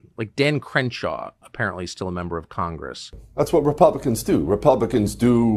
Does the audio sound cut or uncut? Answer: cut